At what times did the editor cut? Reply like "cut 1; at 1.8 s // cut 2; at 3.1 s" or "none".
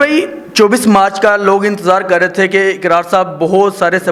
none

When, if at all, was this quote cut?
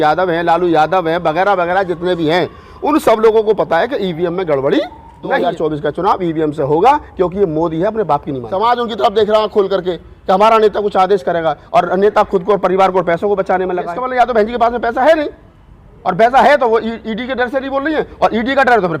cut 1; at 5.4 s // cut 2; at 8.4 s // cut 3; at 14.0 s

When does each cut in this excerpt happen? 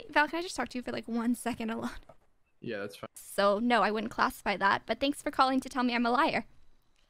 cut 1; at 3.2 s

